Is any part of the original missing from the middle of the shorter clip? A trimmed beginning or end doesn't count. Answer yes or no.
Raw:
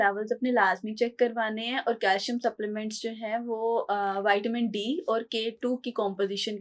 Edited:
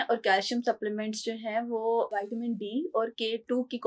yes